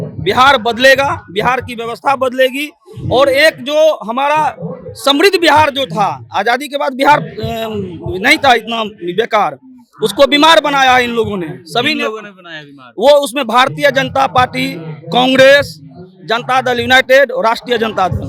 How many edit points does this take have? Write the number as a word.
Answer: zero